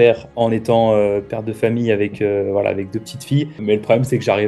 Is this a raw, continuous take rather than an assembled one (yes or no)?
no